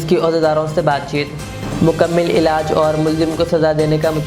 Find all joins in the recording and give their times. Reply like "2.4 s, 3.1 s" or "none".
none